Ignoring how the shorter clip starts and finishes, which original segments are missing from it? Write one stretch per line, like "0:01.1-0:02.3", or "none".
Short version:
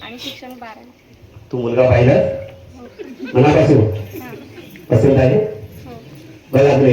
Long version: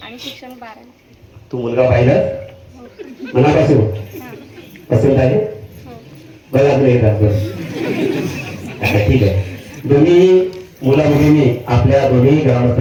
none